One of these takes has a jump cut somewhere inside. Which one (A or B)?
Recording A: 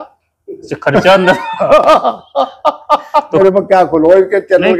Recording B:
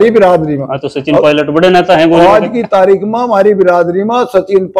A